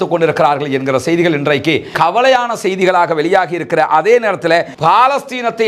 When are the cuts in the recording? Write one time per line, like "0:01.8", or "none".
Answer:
0:04.7